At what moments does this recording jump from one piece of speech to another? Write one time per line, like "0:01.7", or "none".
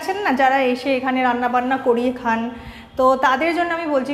none